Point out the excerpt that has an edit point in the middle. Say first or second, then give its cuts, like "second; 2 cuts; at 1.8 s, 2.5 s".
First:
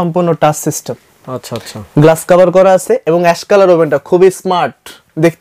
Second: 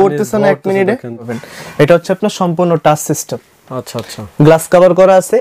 second; 1 cut; at 1.2 s